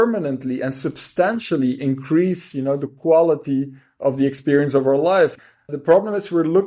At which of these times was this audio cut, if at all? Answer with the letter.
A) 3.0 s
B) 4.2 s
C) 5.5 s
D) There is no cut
C